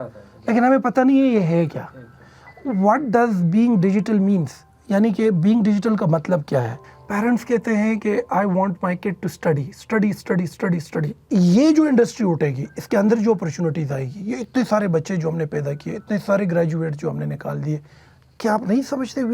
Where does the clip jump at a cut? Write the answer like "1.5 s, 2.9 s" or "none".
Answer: 6.7 s, 11.2 s

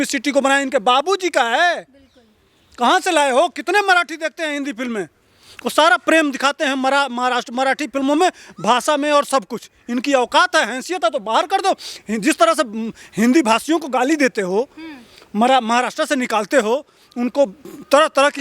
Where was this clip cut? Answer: none

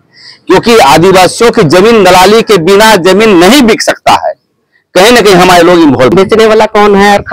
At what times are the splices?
6.1 s

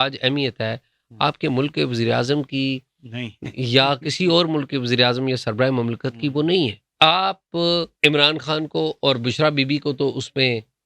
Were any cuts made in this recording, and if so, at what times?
6.9 s, 7.9 s

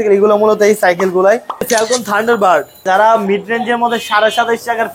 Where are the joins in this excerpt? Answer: 1.7 s, 2.8 s

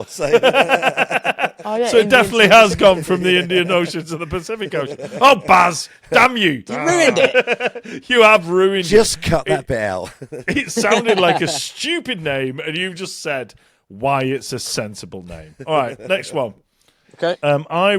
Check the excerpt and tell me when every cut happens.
none

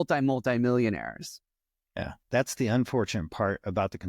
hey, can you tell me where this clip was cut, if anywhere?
2.1 s

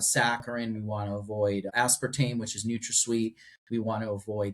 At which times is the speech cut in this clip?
1.7 s

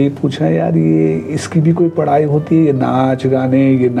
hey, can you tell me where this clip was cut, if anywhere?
none

